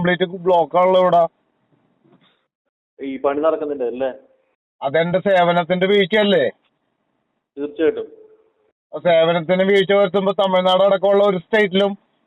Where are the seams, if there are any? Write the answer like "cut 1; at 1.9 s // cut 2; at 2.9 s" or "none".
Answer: none